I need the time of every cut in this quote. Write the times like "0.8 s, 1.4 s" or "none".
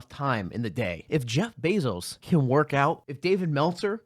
1.0 s, 2.1 s, 3.1 s

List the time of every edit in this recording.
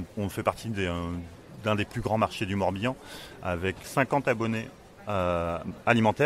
3.8 s

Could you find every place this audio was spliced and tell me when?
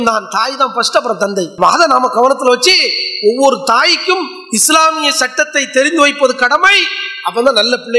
none

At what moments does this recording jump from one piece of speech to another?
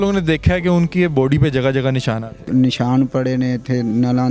2.4 s

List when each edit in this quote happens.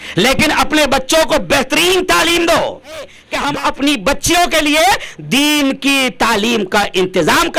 3.2 s

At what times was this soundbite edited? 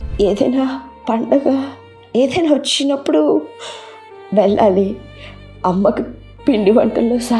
none

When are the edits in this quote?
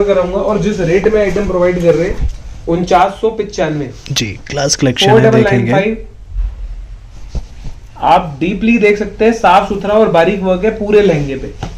none

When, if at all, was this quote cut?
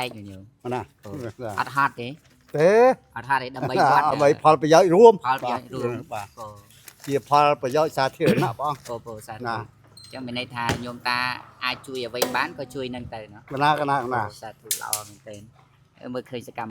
2.3 s, 4.1 s

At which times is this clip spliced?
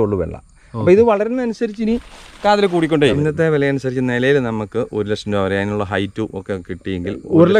3.2 s

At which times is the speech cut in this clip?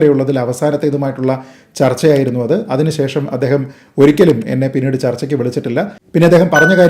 5.9 s

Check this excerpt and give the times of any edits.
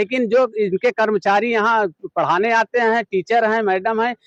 none

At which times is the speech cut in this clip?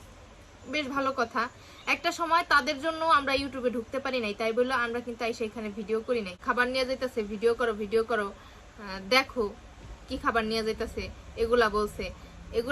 6.3 s

